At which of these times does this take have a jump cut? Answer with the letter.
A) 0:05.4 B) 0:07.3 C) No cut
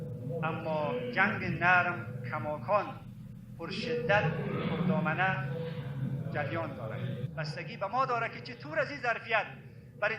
B